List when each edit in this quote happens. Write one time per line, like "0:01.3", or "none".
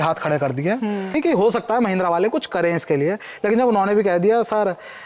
0:01.1